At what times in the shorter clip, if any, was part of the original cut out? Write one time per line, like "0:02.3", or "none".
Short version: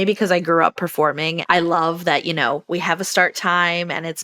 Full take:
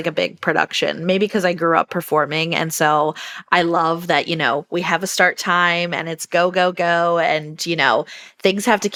0:01.3